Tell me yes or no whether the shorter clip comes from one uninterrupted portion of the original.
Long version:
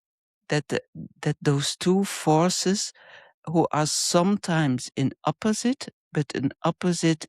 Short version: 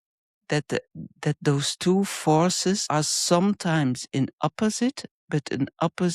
no